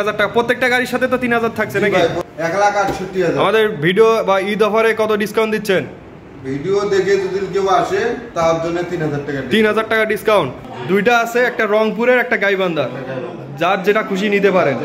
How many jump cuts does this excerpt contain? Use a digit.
2